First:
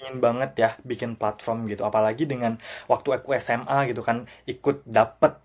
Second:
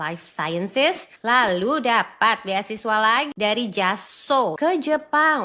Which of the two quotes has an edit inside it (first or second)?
second